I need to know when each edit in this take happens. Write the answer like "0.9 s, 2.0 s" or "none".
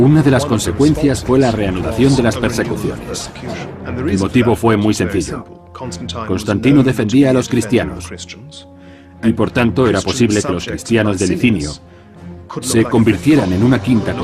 4.6 s